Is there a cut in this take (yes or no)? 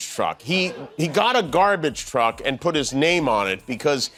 no